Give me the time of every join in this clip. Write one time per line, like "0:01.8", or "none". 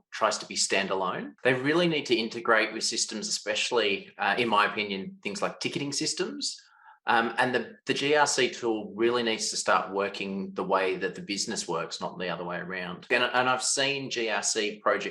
0:01.3
0:13.1